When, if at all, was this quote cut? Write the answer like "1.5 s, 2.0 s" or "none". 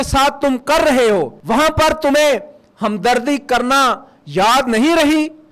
1.4 s